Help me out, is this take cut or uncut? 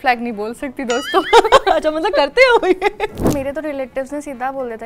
cut